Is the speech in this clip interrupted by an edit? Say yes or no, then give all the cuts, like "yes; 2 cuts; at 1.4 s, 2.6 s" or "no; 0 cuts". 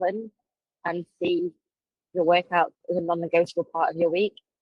no; 0 cuts